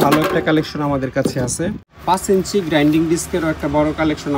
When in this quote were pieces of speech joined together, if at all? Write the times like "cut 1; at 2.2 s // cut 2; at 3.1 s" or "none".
cut 1; at 1.9 s